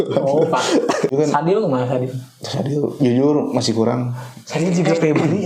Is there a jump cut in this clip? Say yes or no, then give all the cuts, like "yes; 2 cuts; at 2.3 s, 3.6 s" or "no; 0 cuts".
yes; 1 cut; at 1.1 s